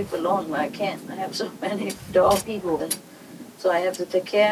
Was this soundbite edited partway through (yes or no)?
no